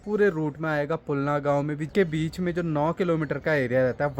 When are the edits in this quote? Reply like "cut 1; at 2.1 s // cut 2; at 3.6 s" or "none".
cut 1; at 1.9 s